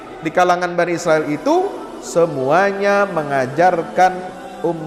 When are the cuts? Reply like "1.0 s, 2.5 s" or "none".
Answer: none